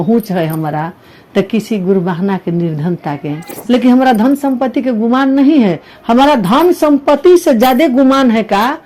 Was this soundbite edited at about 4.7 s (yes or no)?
no